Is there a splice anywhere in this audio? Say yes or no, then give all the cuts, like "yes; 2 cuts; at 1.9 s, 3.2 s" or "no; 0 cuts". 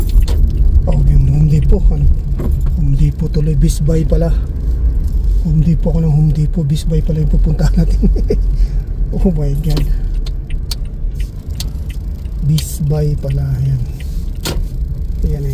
no; 0 cuts